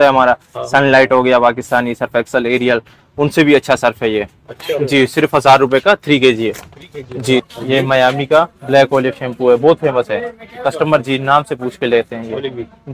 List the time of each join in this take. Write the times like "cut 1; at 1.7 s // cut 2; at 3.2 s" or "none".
cut 1; at 7.4 s